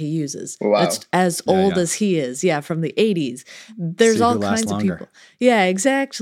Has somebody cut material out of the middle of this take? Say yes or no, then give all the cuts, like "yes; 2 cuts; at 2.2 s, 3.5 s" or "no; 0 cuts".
no; 0 cuts